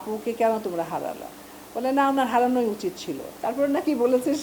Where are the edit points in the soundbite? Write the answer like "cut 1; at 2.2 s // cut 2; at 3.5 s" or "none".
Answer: cut 1; at 3.3 s